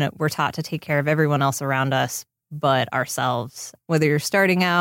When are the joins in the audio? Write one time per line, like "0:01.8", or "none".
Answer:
0:03.8

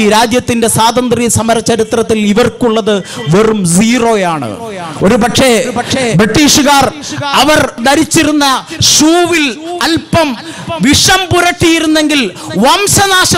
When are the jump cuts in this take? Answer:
0:07.8

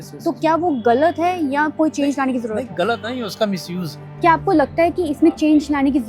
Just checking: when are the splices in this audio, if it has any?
0:04.1

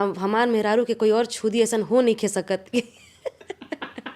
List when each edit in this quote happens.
none

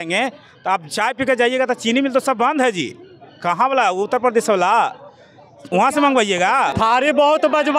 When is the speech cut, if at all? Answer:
0:06.7

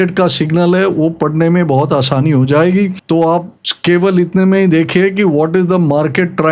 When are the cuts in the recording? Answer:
none

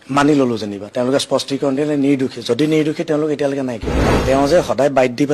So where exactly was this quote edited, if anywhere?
0:04.1

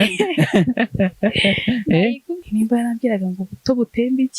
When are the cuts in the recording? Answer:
0:02.4

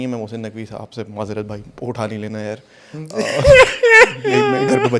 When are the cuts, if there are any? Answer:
none

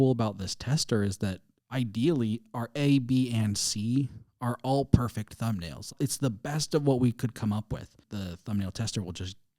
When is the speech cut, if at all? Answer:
0:05.9
0:08.0

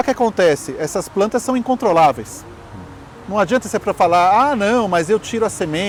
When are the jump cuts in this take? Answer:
none

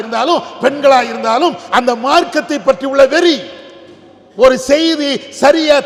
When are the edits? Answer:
none

